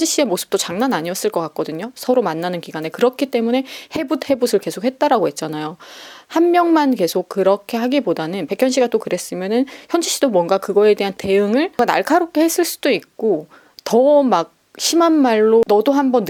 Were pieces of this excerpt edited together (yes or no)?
no